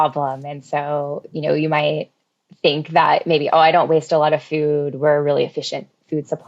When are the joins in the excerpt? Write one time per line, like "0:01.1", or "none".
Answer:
none